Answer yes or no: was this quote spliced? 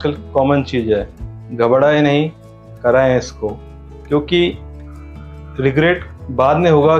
no